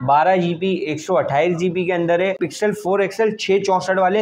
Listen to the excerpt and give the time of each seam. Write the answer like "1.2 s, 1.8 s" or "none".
2.5 s